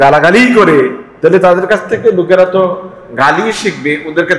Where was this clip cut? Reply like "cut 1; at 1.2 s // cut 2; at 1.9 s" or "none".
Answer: cut 1; at 1.0 s